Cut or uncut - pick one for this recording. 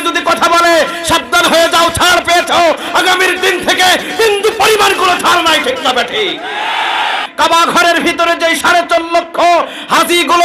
cut